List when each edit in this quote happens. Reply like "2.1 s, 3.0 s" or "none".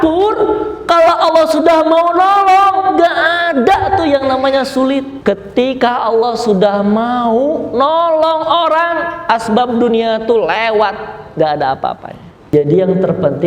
5.1 s, 12.5 s